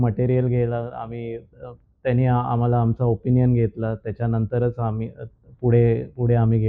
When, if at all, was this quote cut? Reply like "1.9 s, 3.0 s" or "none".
none

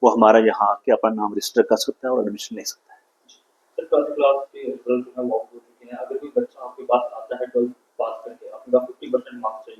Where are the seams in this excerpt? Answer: none

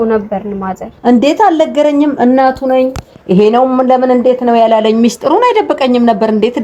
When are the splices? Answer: none

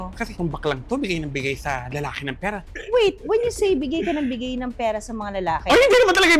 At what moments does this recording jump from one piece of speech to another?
2.6 s

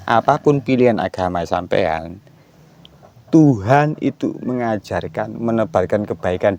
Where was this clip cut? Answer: none

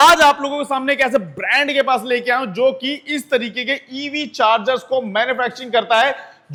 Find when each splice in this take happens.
none

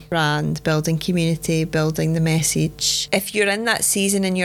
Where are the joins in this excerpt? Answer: 3.0 s

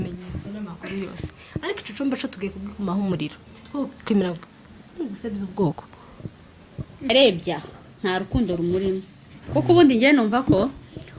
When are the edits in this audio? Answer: 7.1 s

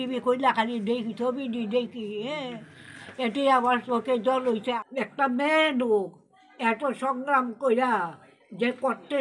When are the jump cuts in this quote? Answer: 4.7 s

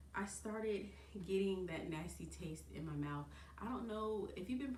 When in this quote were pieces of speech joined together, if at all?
none

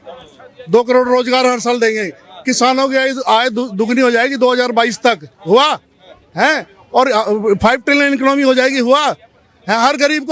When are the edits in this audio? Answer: none

